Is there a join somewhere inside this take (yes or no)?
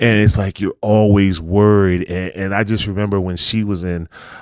no